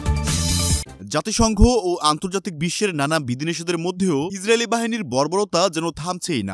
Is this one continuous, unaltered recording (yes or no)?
no